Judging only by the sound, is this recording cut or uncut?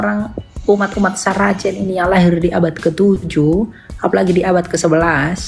uncut